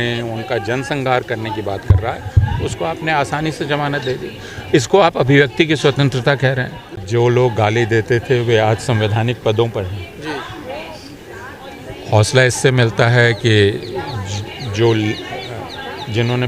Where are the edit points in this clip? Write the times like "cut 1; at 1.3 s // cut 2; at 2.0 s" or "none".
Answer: cut 1; at 7.0 s